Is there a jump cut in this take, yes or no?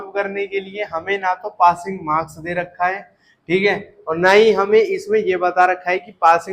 no